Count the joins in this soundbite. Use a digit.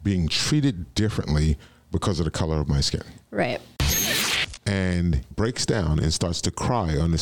2